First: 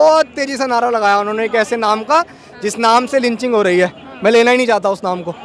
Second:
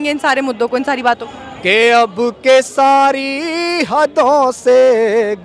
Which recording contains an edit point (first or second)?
second